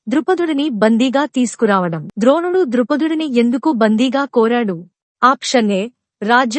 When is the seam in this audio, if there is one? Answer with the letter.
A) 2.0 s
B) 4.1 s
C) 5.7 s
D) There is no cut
A